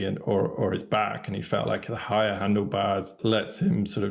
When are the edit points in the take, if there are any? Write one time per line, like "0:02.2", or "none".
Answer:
0:03.1